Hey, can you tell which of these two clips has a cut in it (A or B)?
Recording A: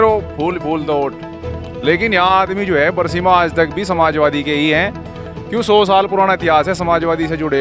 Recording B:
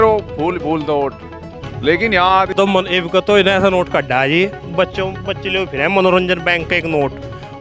B